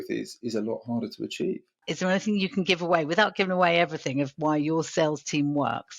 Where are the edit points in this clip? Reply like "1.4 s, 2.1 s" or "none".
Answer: 1.8 s